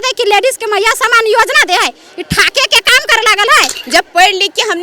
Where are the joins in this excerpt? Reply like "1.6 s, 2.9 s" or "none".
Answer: 3.8 s